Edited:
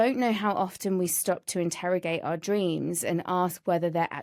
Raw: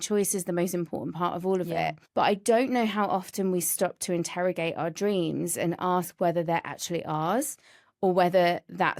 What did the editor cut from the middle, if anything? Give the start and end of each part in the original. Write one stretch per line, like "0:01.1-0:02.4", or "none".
none